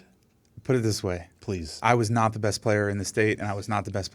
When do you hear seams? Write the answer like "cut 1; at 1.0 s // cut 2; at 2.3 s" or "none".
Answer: none